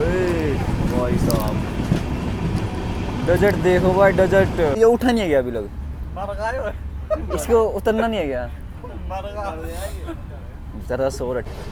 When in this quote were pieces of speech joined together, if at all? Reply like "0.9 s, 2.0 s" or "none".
none

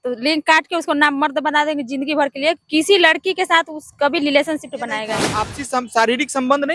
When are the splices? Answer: 5.6 s

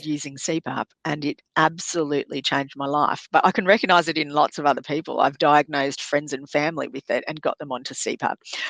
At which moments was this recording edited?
3.2 s

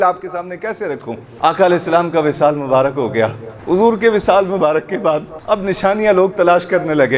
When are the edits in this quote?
1.3 s, 3.5 s, 5.3 s

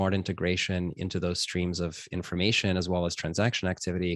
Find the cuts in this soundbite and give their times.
none

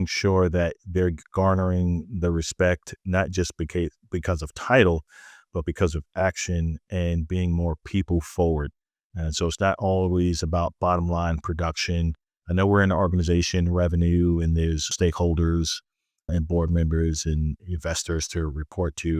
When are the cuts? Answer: none

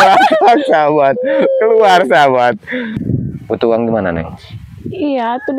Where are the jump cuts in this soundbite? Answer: 3.0 s

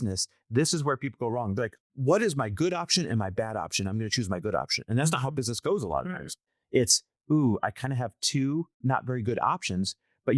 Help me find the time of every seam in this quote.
1.7 s

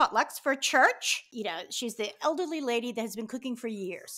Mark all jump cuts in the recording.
1.2 s

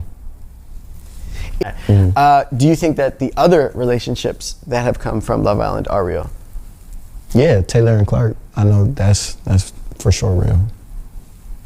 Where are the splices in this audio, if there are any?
1.6 s

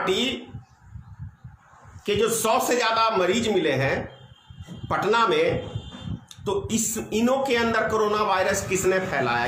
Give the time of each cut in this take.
none

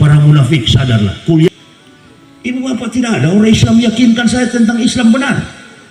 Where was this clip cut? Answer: 1.5 s

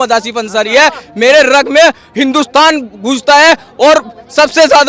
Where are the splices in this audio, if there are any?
none

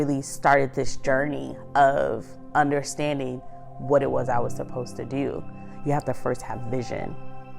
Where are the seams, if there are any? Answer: 5.7 s

